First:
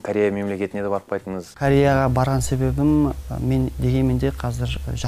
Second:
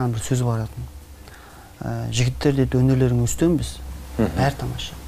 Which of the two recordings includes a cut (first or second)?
second